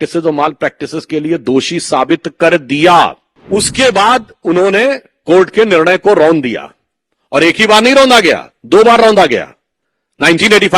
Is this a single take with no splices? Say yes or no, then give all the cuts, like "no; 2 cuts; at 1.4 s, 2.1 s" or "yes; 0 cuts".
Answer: no; 1 cut; at 3.3 s